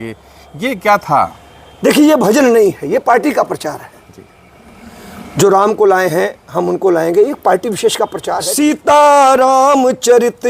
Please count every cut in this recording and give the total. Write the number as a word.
one